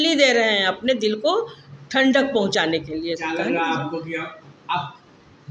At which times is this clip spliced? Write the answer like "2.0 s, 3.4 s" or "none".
none